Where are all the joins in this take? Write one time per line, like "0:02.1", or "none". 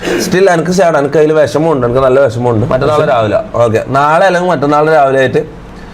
0:02.7

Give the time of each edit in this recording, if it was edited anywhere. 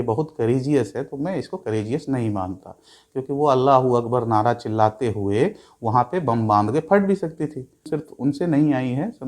0:07.9

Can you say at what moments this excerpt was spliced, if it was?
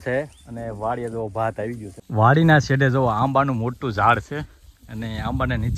0:01.9

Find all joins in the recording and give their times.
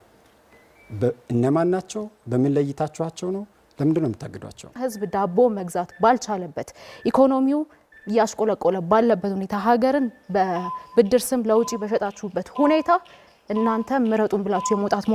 0:04.8

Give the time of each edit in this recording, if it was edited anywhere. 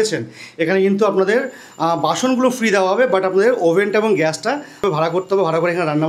0:04.9

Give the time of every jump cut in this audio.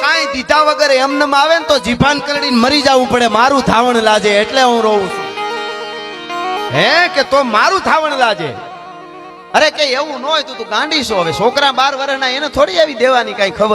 none

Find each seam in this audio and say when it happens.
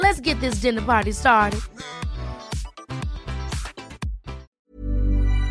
0:04.5

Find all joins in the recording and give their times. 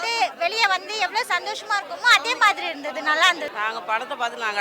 0:03.5

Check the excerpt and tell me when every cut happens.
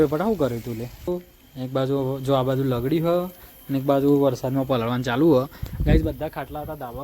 0:01.1

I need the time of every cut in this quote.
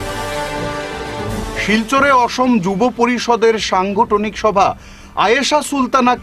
none

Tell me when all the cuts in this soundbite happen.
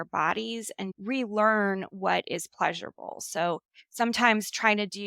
0:00.9

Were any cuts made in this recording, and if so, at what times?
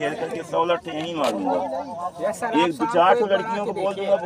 none

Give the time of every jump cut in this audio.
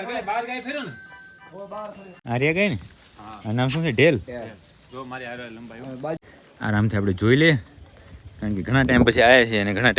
0:02.1
0:06.2

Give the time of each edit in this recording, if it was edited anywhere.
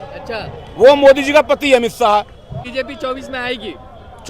0:02.7

